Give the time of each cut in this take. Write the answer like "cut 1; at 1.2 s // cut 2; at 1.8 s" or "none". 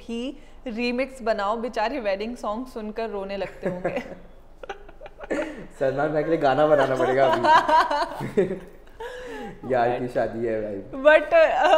none